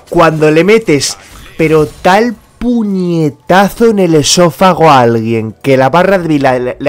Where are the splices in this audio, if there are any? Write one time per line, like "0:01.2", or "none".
none